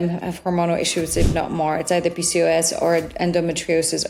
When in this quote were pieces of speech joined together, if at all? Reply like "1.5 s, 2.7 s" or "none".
none